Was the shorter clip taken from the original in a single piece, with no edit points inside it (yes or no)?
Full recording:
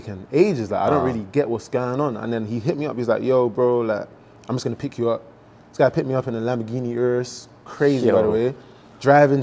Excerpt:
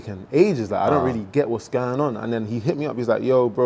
yes